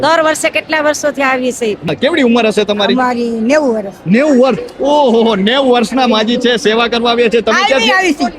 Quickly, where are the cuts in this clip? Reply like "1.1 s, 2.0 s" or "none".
1.9 s